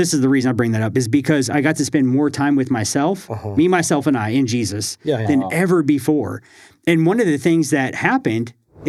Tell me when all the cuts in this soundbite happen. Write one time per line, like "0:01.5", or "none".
none